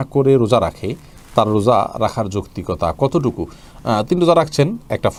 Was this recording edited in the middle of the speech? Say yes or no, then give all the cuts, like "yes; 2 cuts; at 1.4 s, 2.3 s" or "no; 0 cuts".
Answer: no; 0 cuts